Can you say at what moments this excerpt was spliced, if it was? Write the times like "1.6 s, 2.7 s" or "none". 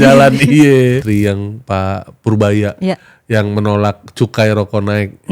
1.0 s